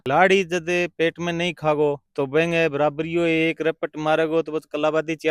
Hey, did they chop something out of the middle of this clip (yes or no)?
no